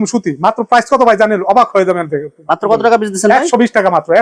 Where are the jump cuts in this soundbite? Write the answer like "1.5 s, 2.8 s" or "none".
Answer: none